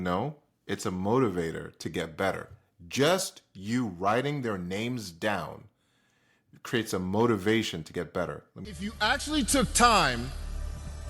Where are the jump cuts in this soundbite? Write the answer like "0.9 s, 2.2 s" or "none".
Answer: 8.5 s